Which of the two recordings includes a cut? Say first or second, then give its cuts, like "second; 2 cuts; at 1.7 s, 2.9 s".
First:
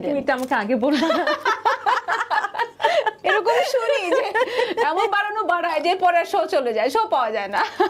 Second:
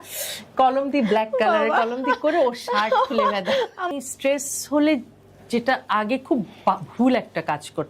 second; 1 cut; at 3.9 s